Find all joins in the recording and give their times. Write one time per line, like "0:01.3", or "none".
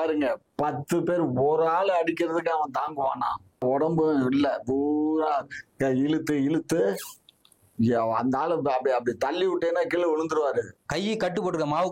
0:03.6
0:10.8